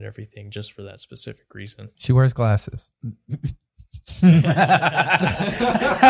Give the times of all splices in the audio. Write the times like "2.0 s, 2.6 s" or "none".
2.0 s, 2.9 s